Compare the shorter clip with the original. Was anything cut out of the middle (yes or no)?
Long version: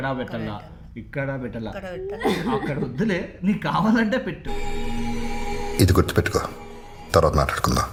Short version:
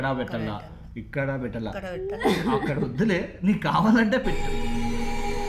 yes